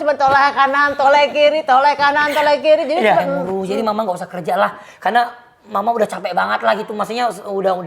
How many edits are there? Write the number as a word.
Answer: one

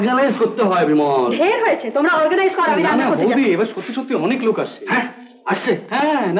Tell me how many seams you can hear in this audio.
zero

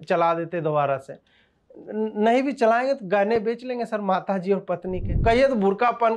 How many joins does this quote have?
one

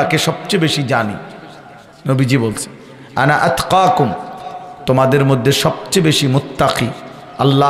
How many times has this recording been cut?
zero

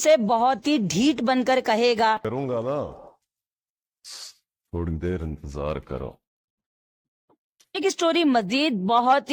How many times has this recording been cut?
zero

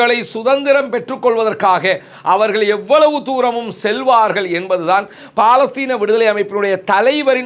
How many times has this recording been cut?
zero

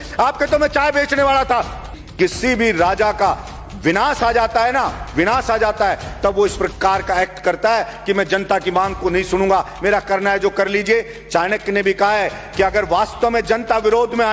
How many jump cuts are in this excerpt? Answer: one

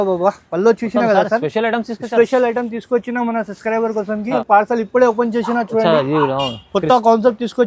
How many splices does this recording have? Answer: one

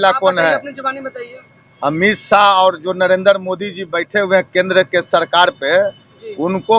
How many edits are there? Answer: zero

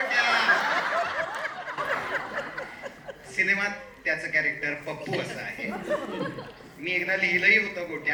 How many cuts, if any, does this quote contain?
zero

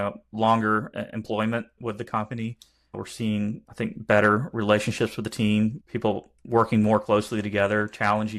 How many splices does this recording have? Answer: four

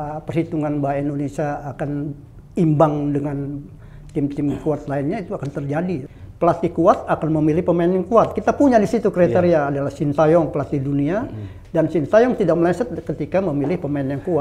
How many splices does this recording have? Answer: one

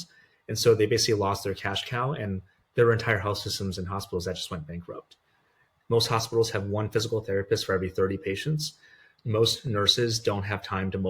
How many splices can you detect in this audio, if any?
one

